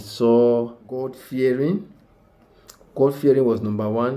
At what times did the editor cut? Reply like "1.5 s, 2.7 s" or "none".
1.2 s